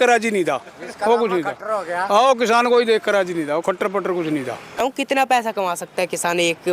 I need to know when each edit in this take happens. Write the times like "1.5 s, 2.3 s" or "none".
4.8 s